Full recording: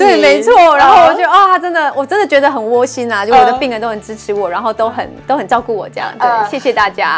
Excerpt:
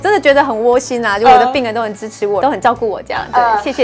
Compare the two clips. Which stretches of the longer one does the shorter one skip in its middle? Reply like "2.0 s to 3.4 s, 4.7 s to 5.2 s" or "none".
4.5 s to 5.3 s